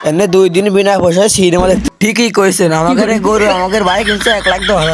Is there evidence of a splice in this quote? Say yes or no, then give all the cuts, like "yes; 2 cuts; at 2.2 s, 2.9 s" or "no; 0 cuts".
yes; 1 cut; at 1.8 s